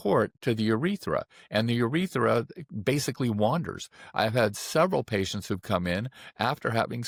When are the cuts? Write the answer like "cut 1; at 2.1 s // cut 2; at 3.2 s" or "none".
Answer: none